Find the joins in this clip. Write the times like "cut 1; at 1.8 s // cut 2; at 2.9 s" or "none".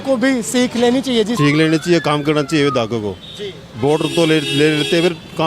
cut 1; at 1.3 s